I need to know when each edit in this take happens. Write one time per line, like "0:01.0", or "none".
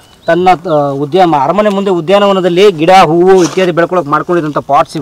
none